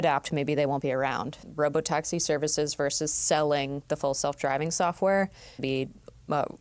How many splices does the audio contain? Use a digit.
2